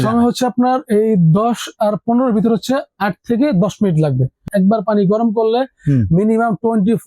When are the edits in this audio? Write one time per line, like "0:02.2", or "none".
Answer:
0:04.4

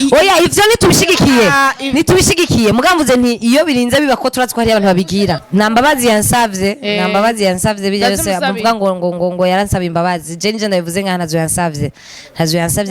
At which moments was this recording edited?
0:05.4

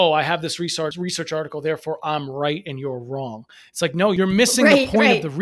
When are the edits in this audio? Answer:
0:01.0
0:04.2

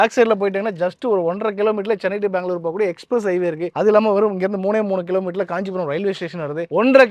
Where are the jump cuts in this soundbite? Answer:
0:03.7

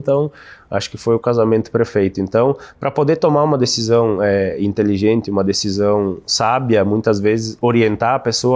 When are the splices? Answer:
none

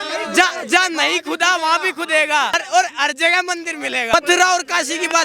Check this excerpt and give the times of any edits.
0:02.6
0:04.1

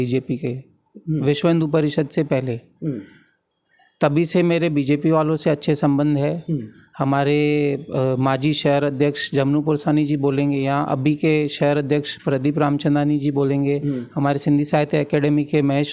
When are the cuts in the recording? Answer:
none

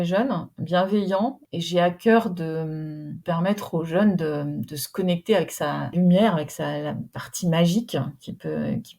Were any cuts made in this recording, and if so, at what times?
0:01.5
0:03.2
0:05.9

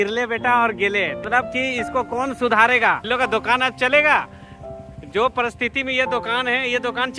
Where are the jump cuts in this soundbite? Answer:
0:01.2
0:03.1

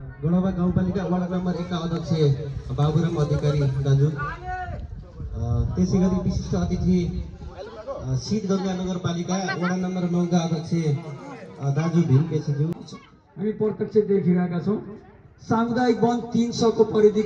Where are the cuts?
0:12.9

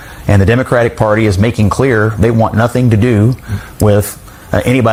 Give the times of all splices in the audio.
none

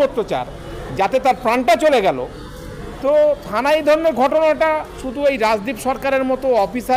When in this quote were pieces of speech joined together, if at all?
none

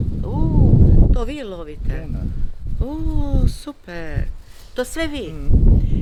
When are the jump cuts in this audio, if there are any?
none

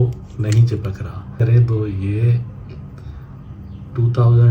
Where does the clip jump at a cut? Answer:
0:01.4

